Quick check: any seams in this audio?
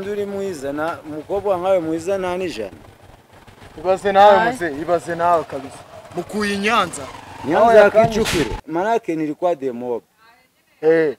yes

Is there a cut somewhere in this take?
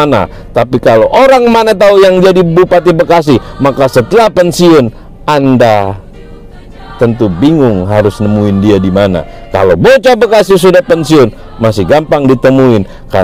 no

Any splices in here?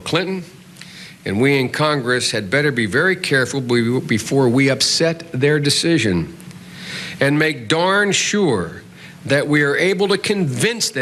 no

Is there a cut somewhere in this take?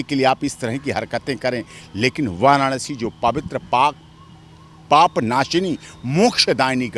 no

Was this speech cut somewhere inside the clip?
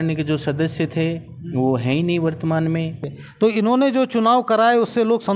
yes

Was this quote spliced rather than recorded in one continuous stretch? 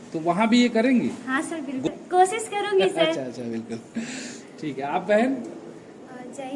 no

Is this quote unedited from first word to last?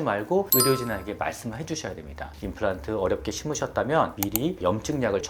yes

